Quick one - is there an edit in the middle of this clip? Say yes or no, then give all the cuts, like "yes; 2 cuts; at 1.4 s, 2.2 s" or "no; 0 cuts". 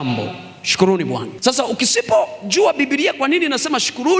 yes; 1 cut; at 1.3 s